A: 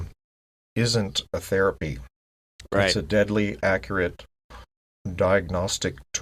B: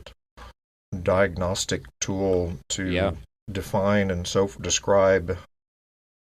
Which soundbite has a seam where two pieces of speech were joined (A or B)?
B